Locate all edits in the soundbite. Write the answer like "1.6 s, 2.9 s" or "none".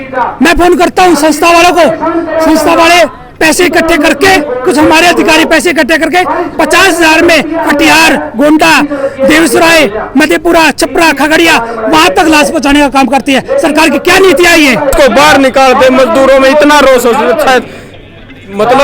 14.9 s